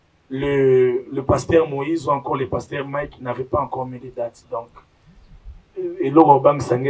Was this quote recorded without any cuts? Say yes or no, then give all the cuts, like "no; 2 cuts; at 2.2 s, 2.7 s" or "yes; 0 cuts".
yes; 0 cuts